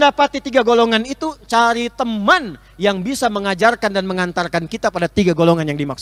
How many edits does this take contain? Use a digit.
0